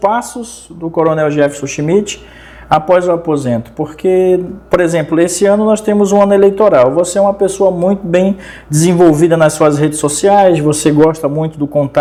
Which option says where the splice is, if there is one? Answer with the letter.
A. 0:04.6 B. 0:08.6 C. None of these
C